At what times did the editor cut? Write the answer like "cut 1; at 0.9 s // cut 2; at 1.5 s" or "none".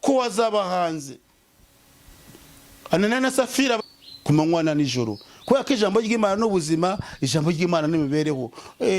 cut 1; at 3.8 s